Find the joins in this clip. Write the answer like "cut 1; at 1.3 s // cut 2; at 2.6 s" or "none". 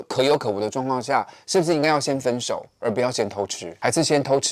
none

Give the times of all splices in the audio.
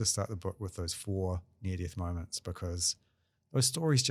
none

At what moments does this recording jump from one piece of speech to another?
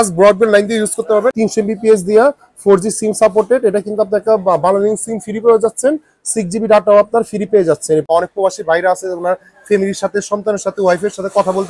cut 1; at 1.3 s // cut 2; at 8.0 s

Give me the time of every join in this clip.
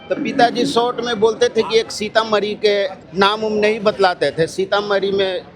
cut 1; at 3.0 s

